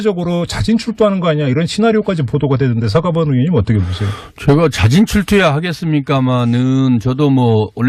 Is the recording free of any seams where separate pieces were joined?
yes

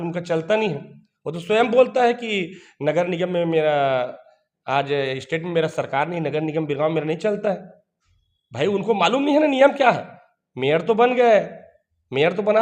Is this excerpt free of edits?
yes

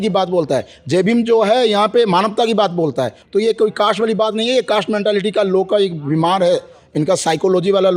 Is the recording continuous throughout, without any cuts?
yes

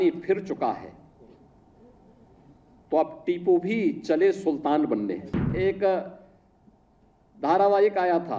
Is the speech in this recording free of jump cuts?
no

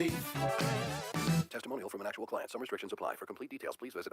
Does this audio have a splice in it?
yes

